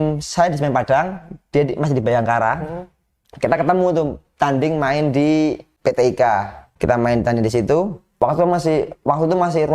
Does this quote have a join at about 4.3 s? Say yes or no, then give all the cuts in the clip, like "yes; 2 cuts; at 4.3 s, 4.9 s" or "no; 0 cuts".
no; 3 cuts; at 5.7 s, 6.6 s, 8.0 s